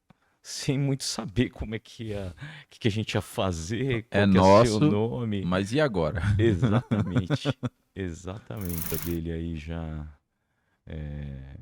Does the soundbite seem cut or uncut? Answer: cut